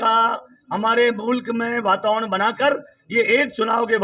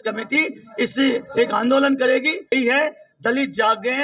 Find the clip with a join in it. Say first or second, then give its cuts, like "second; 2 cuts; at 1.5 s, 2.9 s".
second; 1 cut; at 2.5 s